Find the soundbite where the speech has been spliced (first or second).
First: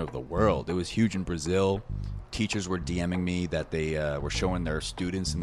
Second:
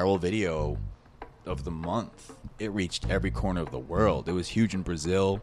second